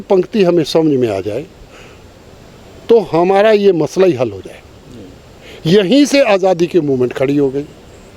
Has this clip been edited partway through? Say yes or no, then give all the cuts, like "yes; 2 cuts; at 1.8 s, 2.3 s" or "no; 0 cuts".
no; 0 cuts